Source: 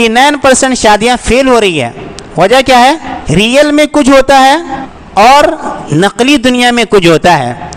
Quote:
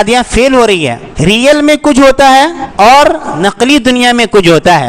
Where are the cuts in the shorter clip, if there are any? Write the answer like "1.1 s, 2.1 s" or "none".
1.0 s, 2.6 s, 3.3 s

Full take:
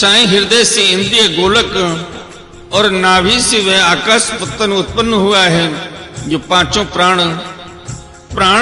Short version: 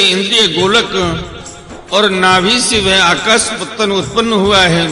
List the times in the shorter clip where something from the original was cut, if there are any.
none

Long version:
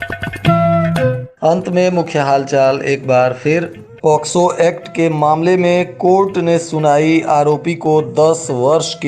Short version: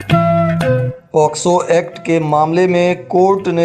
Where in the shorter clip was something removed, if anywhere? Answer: 0.9 s

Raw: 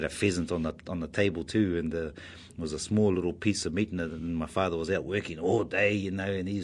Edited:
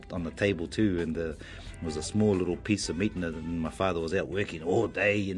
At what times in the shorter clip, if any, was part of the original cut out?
none

